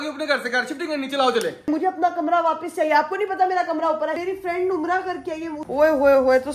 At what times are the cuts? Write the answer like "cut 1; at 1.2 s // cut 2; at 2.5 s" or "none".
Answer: cut 1; at 1.7 s // cut 2; at 4.2 s // cut 3; at 5.6 s